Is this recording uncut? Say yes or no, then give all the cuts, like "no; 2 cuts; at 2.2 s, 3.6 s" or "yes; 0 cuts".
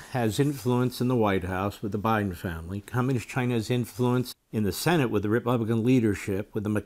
no; 1 cut; at 3.9 s